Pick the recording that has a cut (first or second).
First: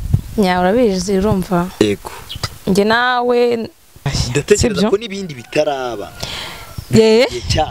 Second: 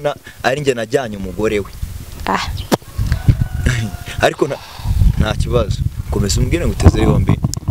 first